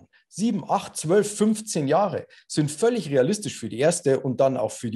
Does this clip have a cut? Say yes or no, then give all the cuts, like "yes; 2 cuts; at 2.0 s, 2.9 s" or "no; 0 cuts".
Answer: no; 0 cuts